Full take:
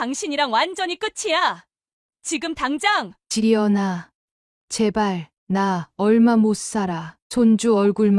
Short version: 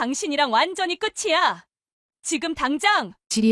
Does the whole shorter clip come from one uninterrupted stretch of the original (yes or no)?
yes